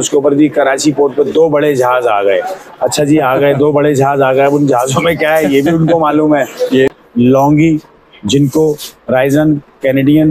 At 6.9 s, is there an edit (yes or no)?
yes